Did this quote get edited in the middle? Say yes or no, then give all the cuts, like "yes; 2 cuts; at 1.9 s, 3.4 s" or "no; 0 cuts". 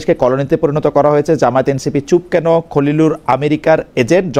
no; 0 cuts